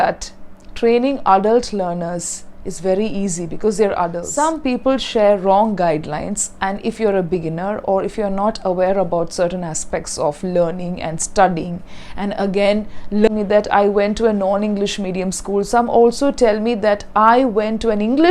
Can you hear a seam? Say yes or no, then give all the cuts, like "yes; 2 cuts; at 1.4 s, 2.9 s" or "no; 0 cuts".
yes; 2 cuts; at 4.2 s, 13.3 s